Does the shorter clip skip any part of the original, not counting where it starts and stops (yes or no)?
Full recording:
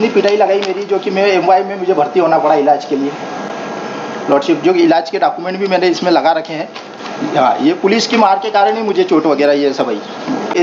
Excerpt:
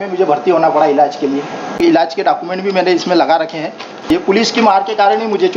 yes